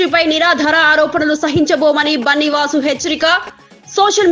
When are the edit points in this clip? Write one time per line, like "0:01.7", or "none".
none